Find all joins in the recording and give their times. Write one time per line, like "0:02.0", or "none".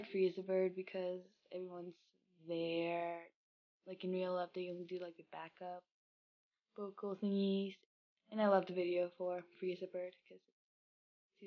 none